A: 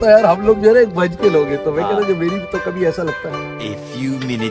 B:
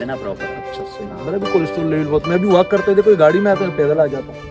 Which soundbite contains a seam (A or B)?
A